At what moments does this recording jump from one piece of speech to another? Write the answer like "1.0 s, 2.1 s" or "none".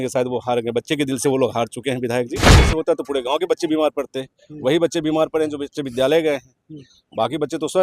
2.7 s